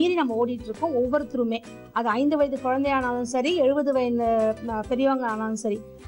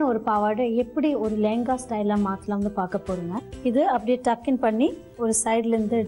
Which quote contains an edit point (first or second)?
second